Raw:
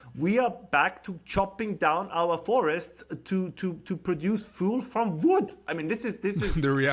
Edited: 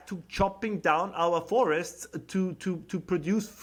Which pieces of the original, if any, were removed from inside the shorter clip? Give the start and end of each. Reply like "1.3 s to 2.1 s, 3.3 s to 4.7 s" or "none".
none